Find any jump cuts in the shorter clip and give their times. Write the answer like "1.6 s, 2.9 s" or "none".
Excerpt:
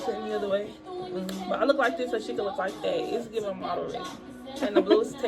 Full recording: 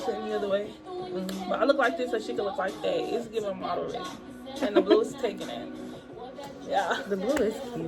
none